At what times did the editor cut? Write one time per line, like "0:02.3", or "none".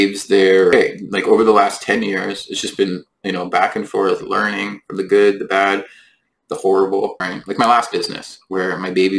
0:00.7
0:07.2

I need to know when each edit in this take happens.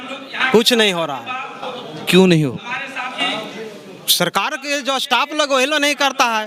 none

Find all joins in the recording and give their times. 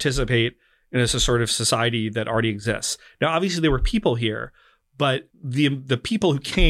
0:05.4

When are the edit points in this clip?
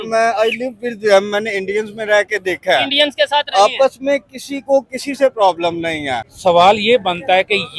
0:06.2

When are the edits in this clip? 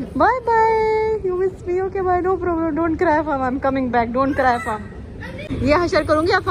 0:05.5

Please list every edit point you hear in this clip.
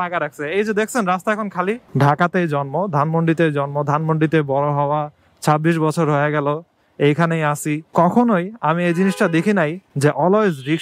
0:01.8

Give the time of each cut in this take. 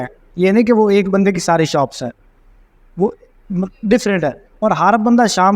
none

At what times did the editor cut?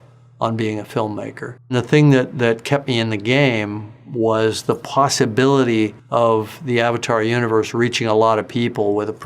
0:01.7
0:06.0

